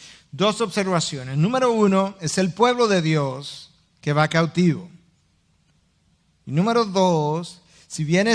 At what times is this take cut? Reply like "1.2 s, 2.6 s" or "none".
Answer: none